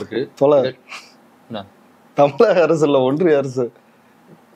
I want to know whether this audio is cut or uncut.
uncut